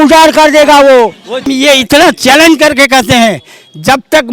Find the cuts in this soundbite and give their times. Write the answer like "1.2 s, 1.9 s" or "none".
1.5 s